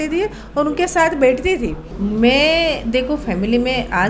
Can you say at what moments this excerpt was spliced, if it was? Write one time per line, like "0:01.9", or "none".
0:01.8